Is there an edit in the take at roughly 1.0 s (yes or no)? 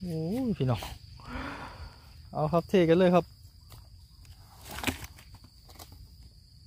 no